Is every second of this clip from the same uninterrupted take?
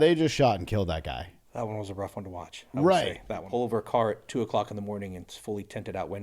no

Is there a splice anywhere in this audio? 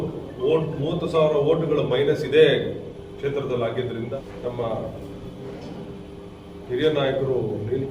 yes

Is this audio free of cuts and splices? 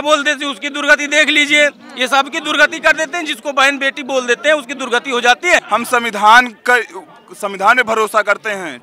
no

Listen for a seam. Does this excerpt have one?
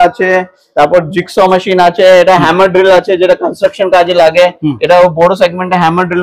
no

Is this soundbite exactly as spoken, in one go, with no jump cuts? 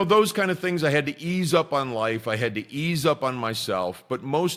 yes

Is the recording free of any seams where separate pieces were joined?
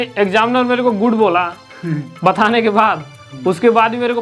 yes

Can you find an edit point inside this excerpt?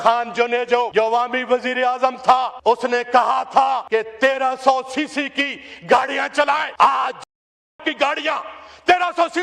yes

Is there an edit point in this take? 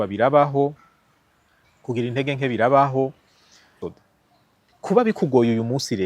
yes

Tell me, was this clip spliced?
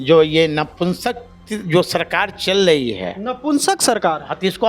no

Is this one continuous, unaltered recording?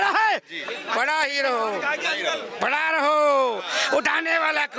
yes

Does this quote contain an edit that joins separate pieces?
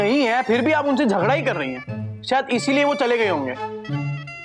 no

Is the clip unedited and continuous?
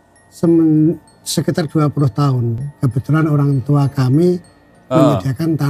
yes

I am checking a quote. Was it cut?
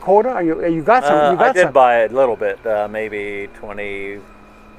no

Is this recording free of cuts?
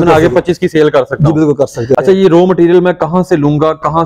no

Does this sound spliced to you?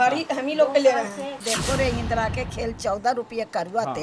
yes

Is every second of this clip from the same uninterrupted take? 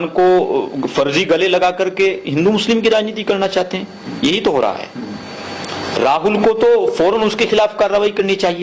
yes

